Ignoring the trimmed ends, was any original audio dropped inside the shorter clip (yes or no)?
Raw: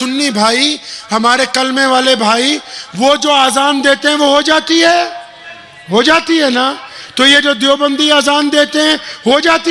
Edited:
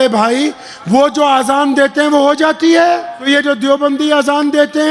yes